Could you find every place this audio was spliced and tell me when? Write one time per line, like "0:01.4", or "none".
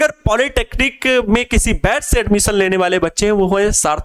none